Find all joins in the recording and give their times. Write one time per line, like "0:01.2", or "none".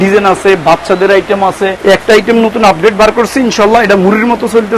0:01.8